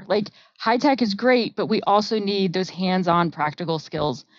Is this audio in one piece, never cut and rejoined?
yes; 0 cuts

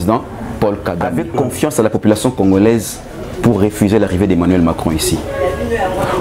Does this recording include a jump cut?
yes; 1 cut; at 1.2 s

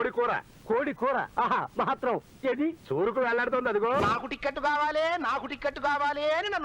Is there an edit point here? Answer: yes; 1 cut; at 4.0 s

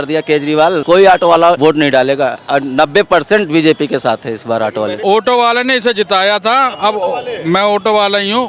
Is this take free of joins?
no; 3 cuts; at 0.8 s, 1.6 s, 5.0 s

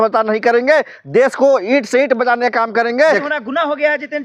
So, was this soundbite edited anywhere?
yes; 1 cut; at 3.2 s

